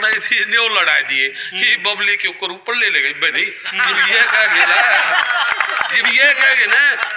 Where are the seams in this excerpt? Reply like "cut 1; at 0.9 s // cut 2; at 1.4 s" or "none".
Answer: none

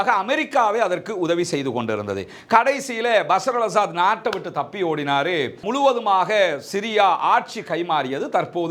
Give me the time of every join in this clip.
none

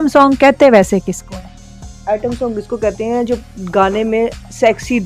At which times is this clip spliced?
none

